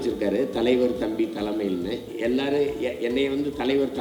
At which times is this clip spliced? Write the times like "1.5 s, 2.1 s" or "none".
2.1 s